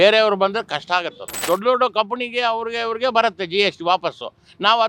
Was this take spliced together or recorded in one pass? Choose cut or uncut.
cut